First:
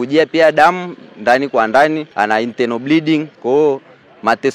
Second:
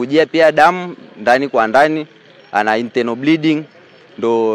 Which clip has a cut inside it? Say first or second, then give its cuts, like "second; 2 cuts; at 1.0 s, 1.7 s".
first; 2 cuts; at 2.1 s, 3.3 s